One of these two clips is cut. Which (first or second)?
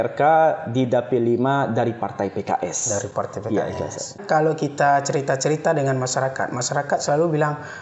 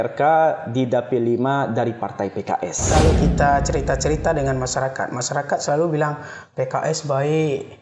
second